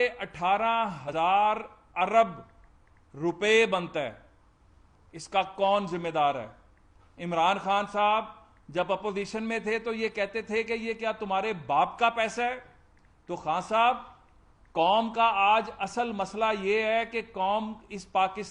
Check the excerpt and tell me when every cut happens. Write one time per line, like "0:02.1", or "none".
0:01.0